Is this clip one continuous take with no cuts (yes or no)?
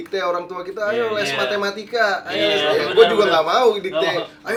yes